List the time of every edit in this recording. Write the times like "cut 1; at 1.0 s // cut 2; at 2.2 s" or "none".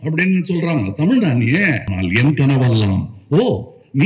cut 1; at 1.9 s